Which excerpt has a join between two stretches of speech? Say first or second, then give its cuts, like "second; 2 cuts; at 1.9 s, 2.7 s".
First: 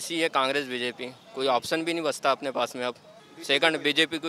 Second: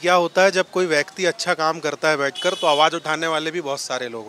first; 1 cut; at 3.1 s